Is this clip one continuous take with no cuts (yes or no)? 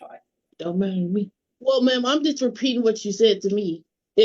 no